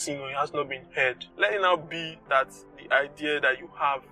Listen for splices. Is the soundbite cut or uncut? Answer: cut